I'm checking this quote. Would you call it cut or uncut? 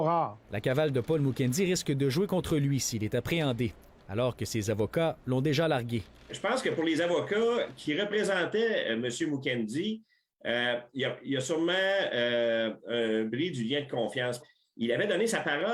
uncut